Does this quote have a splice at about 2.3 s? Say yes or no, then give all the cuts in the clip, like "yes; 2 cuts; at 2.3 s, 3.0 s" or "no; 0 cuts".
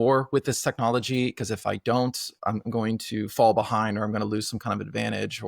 yes; 1 cut; at 2.3 s